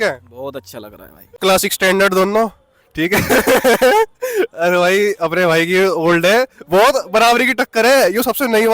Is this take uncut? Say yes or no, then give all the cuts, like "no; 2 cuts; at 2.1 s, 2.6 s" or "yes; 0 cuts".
no; 1 cut; at 1.4 s